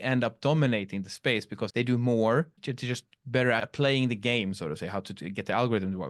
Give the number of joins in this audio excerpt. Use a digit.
3